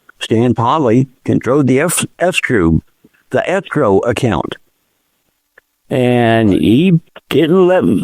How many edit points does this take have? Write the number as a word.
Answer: zero